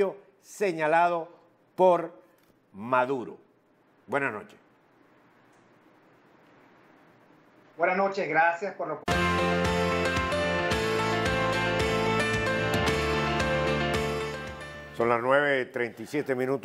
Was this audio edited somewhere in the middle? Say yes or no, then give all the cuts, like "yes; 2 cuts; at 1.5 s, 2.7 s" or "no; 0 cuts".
no; 0 cuts